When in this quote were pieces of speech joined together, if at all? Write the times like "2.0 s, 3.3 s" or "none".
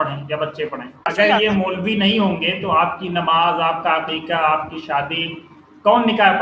1.1 s